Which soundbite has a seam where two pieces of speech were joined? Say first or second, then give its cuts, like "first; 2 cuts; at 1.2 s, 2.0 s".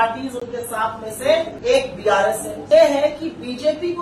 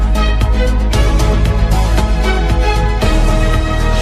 first; 2 cuts; at 1.5 s, 2.6 s